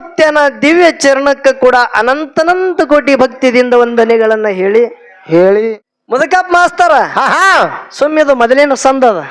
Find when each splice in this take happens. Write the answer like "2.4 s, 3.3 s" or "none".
5.7 s